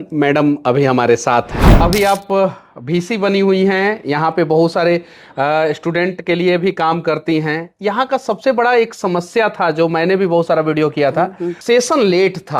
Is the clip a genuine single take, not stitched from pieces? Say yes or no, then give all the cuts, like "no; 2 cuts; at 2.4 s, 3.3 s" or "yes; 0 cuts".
no; 2 cuts; at 1.8 s, 11.6 s